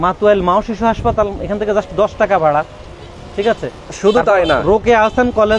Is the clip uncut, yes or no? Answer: yes